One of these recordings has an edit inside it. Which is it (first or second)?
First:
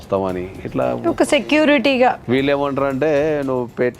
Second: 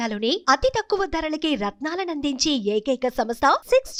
first